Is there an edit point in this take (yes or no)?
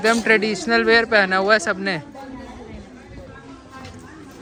no